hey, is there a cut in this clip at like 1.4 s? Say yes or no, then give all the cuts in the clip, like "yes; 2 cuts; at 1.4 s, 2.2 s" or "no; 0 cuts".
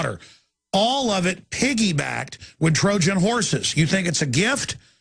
no; 0 cuts